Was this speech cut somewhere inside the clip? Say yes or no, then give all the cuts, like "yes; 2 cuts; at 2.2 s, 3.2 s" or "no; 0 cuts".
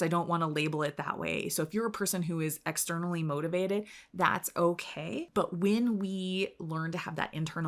no; 0 cuts